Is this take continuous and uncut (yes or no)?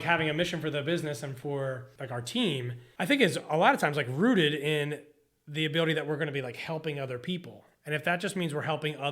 no